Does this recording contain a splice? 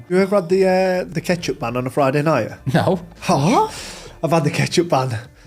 yes; 1 cut; at 1.1 s

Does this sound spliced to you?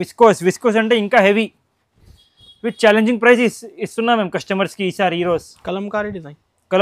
no; 0 cuts

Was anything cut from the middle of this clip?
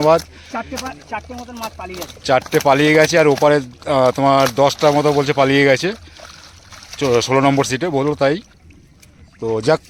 no; 0 cuts

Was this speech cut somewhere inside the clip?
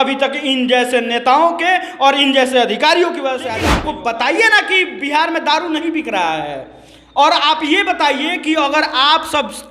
yes; 1 cut; at 3.7 s

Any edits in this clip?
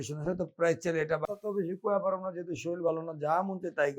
yes; 1 cut; at 1.3 s

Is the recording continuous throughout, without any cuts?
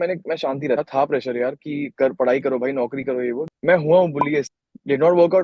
no; 3 cuts; at 0.8 s, 3.5 s, 4.5 s

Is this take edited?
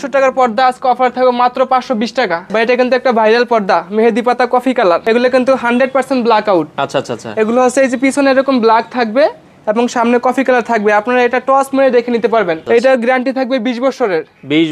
yes; 3 cuts; at 2.4 s, 5.0 s, 12.6 s

